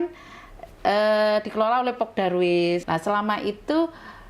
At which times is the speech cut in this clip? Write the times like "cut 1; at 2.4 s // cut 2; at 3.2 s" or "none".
cut 1; at 2.8 s